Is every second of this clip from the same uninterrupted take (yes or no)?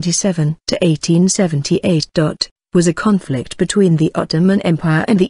no